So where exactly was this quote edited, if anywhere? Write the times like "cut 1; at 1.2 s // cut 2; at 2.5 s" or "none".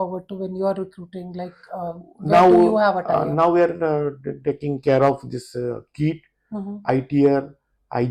none